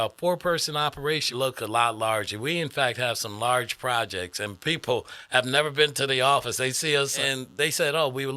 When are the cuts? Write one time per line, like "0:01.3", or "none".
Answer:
0:01.3
0:07.2